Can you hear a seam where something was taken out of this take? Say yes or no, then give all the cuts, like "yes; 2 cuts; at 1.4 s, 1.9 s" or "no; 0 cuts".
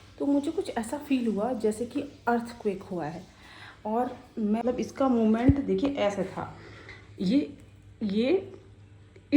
yes; 1 cut; at 4.6 s